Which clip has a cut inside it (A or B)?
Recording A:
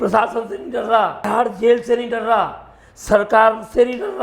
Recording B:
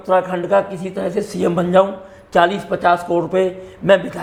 A